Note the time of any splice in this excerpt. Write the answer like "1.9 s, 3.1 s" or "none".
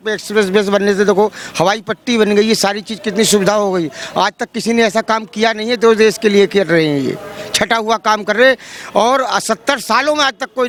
none